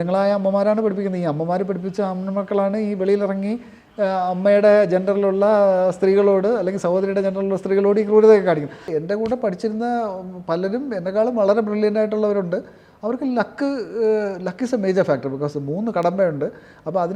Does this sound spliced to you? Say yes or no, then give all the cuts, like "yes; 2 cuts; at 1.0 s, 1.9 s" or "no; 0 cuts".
yes; 1 cut; at 8.9 s